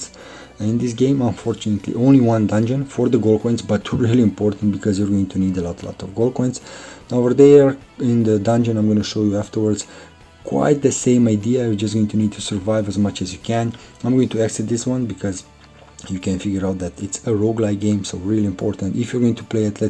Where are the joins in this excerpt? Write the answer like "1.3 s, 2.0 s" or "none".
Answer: none